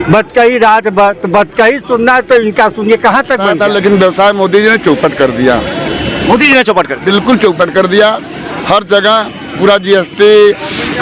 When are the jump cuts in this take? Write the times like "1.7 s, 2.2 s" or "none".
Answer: 3.5 s